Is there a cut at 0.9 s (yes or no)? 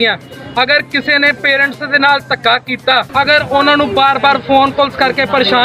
no